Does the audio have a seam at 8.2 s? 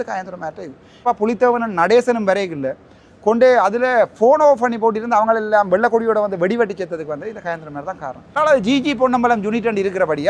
yes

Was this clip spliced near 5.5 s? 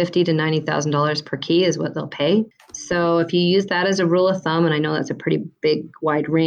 no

